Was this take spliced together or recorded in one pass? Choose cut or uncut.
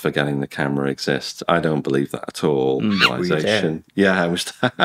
cut